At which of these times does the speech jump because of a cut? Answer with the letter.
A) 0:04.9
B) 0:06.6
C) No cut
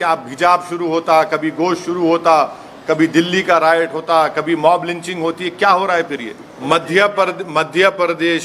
B